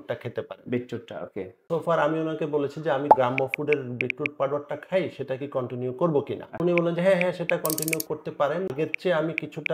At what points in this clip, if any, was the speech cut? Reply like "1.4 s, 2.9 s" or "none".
1.7 s, 3.1 s, 6.6 s, 8.7 s